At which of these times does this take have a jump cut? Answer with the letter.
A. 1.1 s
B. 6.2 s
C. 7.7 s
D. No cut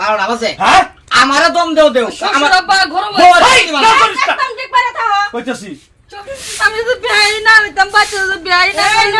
B